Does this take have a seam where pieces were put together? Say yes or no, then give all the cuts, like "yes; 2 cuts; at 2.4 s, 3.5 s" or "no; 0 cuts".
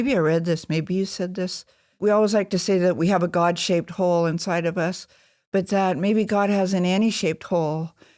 yes; 1 cut; at 2.0 s